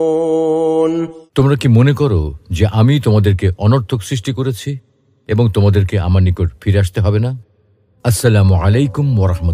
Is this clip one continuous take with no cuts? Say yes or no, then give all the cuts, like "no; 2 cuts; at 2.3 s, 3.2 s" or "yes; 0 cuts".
no; 1 cut; at 1.1 s